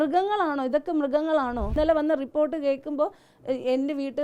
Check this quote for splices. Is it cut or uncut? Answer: cut